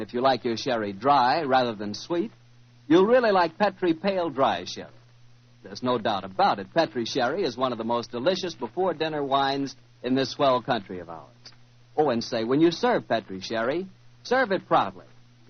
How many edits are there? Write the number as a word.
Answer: one